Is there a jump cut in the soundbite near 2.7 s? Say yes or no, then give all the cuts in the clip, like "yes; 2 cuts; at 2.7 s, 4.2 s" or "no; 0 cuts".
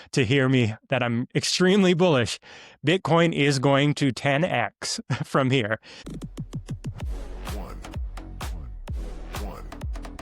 no; 1 cut; at 5.9 s